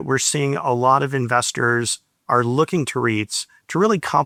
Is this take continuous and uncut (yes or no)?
yes